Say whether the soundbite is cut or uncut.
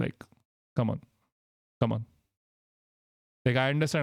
uncut